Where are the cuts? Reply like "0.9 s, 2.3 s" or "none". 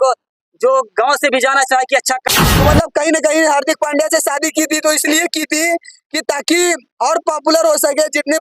2.3 s

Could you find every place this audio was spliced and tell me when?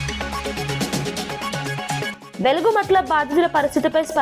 2.2 s

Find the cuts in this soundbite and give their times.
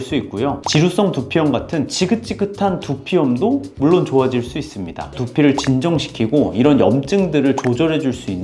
5.1 s

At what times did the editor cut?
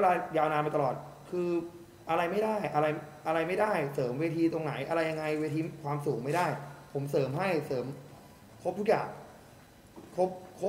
none

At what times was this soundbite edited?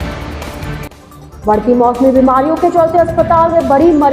0.9 s

